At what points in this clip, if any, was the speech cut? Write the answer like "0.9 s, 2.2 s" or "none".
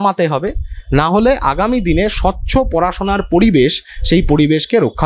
none